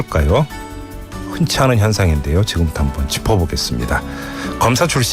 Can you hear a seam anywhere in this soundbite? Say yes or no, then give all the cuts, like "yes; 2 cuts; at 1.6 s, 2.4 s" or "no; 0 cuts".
yes; 1 cut; at 2.7 s